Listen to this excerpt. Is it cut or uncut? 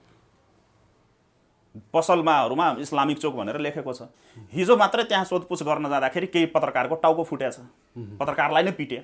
uncut